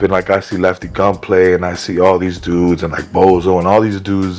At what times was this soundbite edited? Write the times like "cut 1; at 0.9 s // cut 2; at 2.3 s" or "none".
none

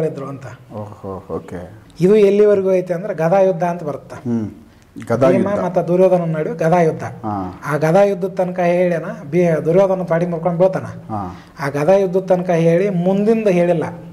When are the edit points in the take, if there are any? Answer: cut 1; at 1.8 s

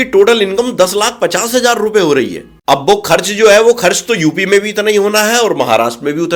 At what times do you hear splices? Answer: none

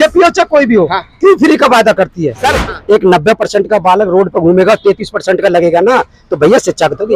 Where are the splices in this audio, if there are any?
cut 1; at 2.7 s

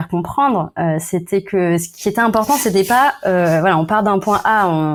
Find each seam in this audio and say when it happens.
none

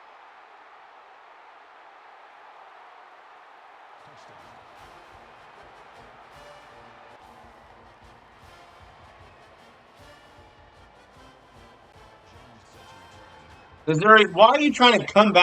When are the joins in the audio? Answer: cut 1; at 7.2 s

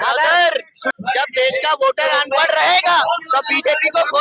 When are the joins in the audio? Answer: cut 1; at 1.0 s

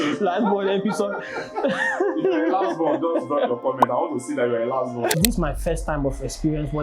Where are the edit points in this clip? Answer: cut 1; at 5.2 s

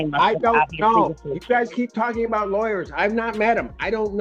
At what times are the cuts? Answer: none

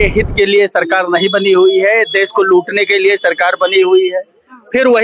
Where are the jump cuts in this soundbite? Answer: none

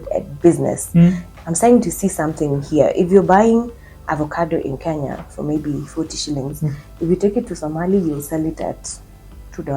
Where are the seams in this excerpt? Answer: cut 1; at 1.2 s // cut 2; at 3.9 s

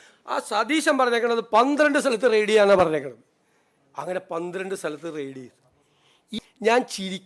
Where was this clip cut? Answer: cut 1; at 6.2 s

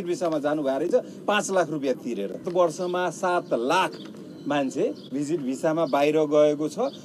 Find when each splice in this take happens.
cut 1; at 2.5 s

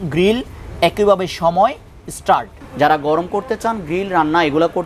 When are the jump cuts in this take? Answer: cut 1; at 2.6 s

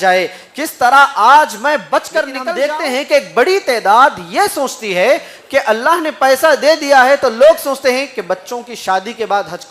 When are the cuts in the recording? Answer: cut 1; at 2.4 s

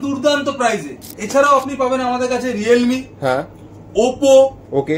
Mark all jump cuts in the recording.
cut 1; at 1.0 s

